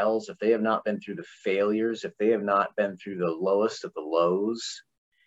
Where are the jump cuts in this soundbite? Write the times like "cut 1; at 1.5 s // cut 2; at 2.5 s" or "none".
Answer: none